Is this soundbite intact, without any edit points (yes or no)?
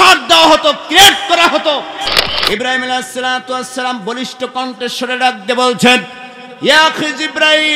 no